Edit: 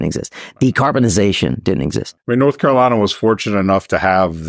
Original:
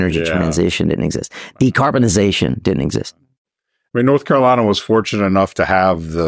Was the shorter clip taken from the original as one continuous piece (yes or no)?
no